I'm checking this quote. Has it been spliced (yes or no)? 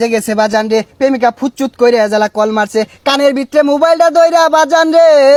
no